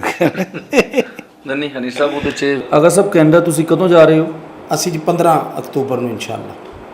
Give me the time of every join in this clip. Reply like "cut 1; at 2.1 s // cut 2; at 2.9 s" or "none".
cut 1; at 2.6 s